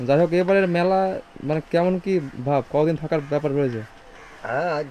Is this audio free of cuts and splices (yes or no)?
yes